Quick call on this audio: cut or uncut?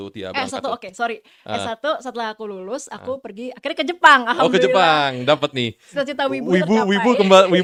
uncut